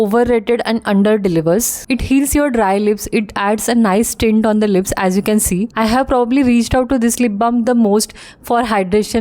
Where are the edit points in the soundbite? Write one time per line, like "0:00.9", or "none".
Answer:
0:01.8
0:05.7